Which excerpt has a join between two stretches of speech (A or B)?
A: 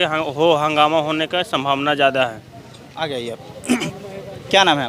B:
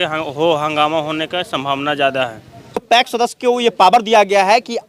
B